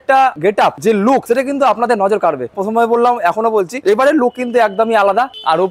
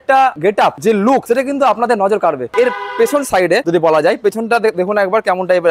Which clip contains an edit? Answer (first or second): second